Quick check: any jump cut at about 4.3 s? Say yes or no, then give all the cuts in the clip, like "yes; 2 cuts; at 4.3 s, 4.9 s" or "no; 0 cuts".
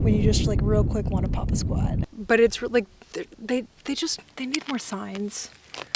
no; 1 cut; at 2.0 s